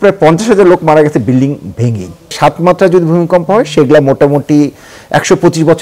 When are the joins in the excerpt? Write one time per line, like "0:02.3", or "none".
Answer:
0:02.4